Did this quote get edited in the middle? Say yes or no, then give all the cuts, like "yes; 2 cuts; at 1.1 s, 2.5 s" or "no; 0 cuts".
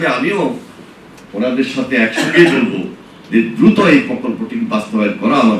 no; 0 cuts